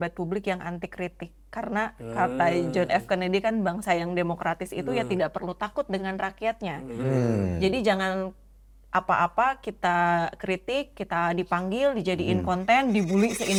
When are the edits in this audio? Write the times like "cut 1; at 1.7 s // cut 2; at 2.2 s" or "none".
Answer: none